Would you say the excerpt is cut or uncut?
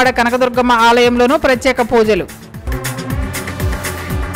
uncut